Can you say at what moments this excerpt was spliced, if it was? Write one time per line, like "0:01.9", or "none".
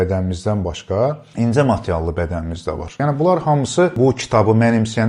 0:01.2
0:03.0
0:03.9